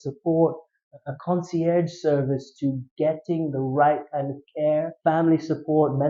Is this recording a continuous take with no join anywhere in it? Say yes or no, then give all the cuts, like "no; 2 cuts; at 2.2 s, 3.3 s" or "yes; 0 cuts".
yes; 0 cuts